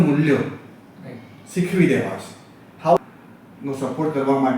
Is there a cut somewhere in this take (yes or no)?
yes